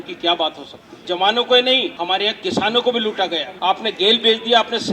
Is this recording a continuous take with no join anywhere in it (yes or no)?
no